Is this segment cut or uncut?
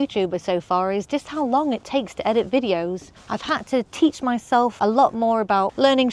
uncut